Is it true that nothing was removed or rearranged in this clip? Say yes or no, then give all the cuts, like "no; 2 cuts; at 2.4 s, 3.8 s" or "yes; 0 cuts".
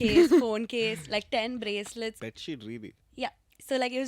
no; 1 cut; at 2.2 s